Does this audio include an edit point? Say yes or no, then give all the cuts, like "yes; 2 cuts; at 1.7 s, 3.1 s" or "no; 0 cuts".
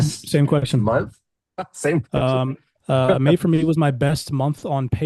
yes; 1 cut; at 2.7 s